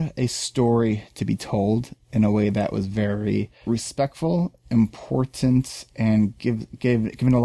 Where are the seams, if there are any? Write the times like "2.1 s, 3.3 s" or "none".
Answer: 3.6 s